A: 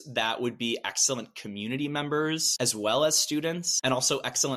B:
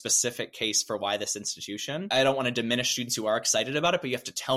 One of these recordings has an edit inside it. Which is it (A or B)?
A